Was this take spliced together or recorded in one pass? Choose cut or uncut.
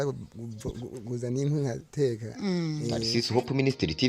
cut